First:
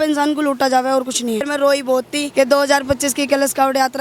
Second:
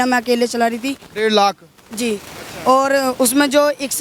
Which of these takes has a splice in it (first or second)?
first